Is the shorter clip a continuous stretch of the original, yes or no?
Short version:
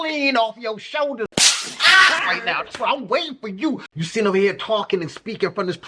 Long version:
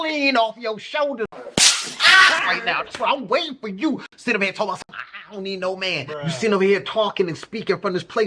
no